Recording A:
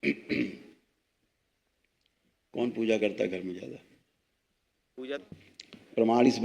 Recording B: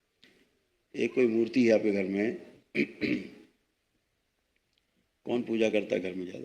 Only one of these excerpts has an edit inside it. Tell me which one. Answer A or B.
A